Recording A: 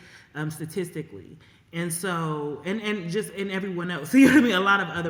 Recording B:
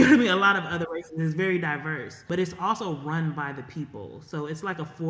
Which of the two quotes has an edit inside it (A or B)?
B